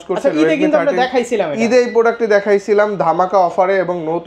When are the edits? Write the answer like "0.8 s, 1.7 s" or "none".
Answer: none